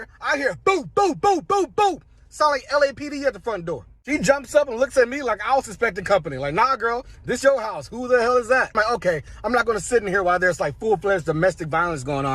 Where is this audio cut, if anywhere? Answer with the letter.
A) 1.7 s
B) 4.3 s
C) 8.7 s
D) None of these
C